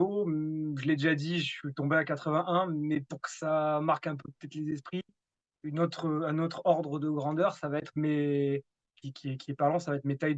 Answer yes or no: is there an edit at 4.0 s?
no